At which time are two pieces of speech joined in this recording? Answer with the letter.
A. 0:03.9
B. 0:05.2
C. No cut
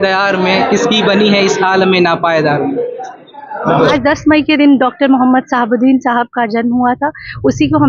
A